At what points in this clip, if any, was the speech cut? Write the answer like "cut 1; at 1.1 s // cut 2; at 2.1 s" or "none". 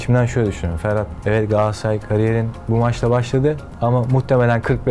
cut 1; at 1.1 s // cut 2; at 3.7 s